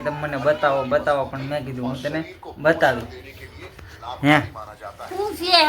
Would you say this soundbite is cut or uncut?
uncut